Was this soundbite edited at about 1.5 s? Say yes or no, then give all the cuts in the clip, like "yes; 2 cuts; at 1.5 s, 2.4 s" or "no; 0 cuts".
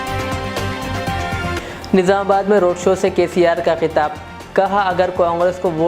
yes; 1 cut; at 1.5 s